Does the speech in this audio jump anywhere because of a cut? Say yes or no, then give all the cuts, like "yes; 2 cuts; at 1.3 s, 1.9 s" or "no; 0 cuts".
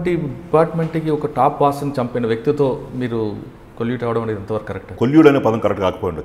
yes; 1 cut; at 4.9 s